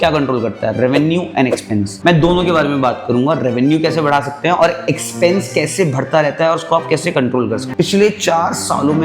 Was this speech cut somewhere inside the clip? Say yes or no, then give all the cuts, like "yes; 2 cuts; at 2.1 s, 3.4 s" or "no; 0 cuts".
yes; 2 cuts; at 1.9 s, 7.7 s